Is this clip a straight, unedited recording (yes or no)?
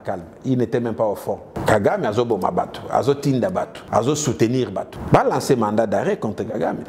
no